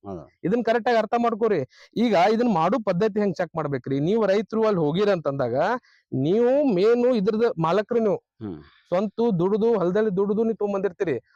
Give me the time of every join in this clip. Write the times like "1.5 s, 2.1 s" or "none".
none